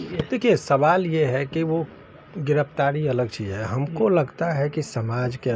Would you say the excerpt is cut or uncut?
uncut